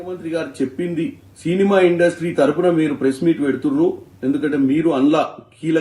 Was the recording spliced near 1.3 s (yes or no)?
yes